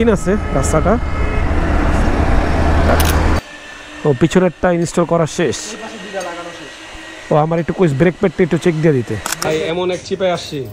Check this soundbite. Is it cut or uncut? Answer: cut